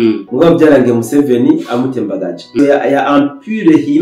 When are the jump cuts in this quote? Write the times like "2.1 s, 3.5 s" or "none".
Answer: 2.5 s